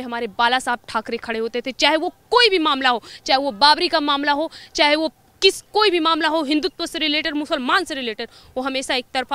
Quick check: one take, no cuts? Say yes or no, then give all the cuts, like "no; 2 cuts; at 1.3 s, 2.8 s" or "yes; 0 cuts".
yes; 0 cuts